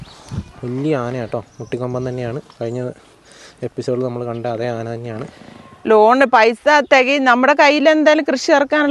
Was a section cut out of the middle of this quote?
yes; 1 cut; at 5.7 s

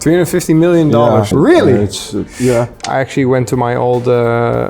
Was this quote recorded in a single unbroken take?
no; 2 cuts; at 1.3 s, 2.8 s

